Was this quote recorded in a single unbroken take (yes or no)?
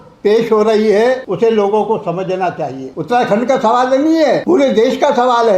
no